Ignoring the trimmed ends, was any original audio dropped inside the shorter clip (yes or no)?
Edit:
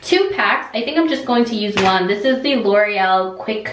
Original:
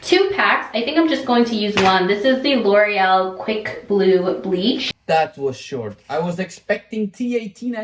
no